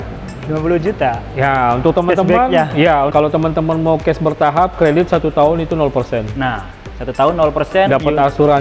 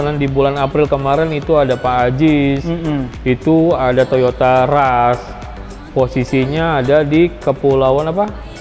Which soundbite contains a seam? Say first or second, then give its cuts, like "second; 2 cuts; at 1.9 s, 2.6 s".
first; 1 cut; at 3.1 s